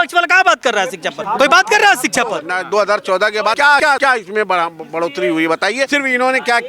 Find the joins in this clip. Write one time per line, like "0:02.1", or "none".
0:01.1
0:02.5
0:03.8
0:05.9